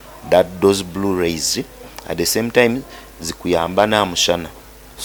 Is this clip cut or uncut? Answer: uncut